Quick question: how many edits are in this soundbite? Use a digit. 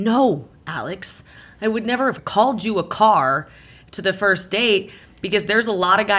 1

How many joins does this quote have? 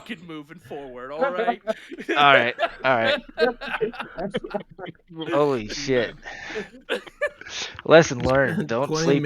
0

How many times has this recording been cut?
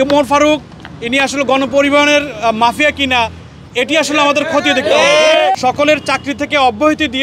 1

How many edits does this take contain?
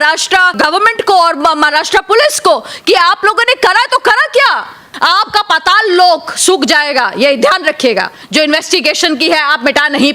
2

